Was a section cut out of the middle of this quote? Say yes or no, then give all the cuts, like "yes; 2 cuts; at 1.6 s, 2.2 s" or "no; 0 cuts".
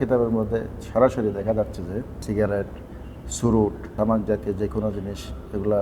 yes; 2 cuts; at 2.1 s, 3.9 s